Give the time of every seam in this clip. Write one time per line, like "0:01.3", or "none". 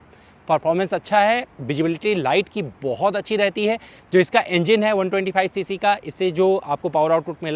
none